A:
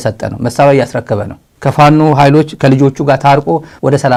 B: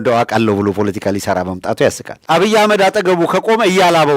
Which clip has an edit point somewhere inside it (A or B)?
B